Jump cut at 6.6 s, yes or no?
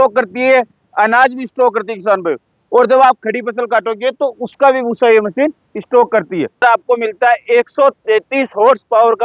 yes